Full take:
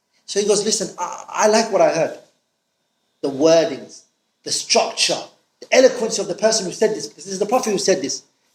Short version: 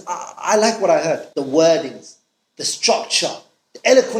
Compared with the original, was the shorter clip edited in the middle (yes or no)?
yes